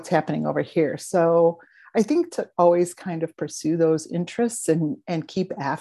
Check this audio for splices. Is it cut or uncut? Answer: uncut